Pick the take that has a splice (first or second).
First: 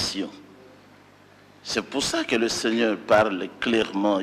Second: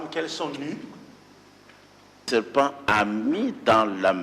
second